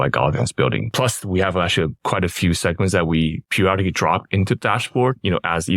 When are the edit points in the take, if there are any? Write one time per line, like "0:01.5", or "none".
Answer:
0:00.9